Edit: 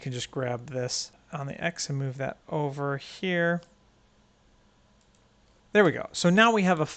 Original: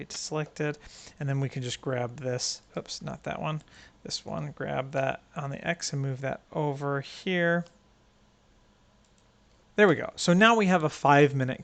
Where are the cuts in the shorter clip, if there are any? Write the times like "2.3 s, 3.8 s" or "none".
1.2 s